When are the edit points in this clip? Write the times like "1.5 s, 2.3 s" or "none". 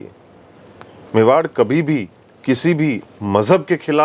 none